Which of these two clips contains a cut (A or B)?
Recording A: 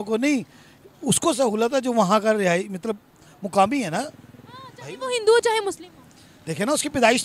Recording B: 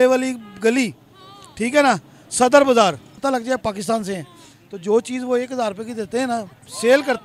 B